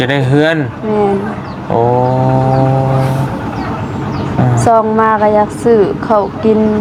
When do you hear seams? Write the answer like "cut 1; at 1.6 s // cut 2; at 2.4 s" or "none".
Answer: none